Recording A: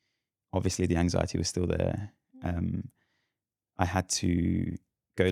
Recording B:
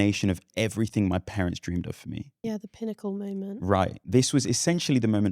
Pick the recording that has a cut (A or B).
B